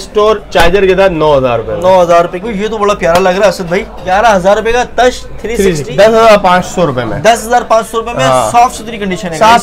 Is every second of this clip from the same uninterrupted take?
no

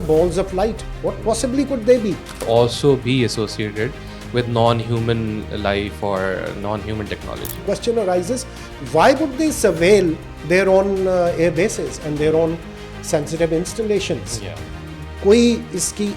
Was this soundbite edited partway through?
yes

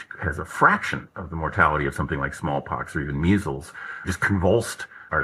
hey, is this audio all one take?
no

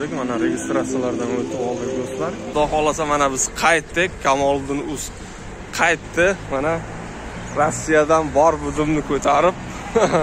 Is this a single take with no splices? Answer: no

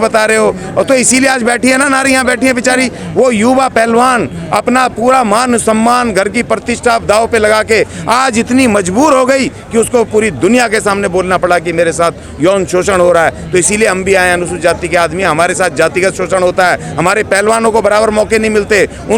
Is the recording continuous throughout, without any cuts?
yes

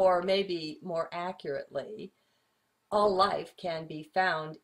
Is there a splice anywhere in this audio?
no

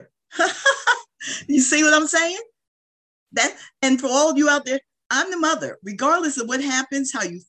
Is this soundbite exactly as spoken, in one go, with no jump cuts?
yes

